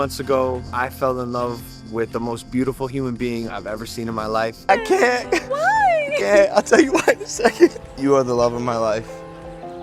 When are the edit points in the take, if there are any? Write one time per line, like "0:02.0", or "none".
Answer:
0:04.6

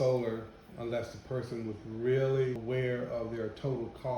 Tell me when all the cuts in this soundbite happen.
0:02.6

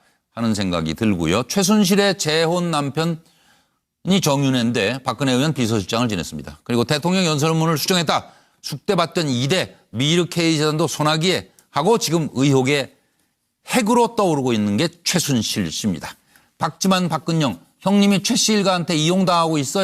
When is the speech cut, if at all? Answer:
0:14.1

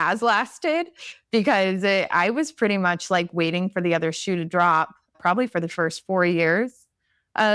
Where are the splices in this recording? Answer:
0:05.2

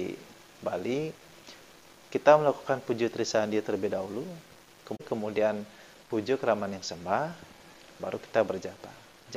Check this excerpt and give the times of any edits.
0:05.0

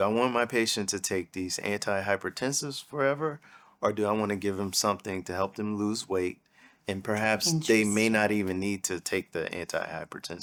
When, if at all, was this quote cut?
none

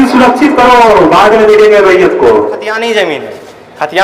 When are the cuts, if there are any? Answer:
0:02.8

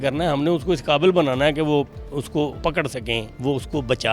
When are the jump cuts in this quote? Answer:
0:02.9

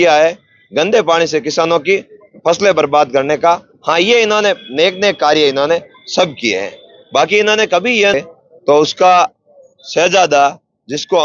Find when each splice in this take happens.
0:08.1

